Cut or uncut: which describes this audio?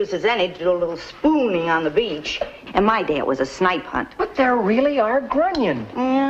uncut